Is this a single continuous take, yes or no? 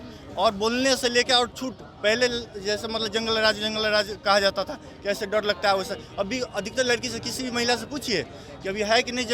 yes